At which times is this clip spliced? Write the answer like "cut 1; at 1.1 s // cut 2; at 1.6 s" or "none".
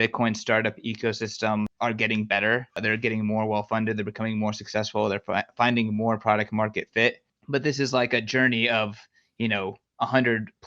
cut 1; at 1.7 s // cut 2; at 2.8 s // cut 3; at 7.3 s